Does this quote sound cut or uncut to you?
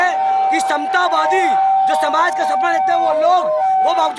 uncut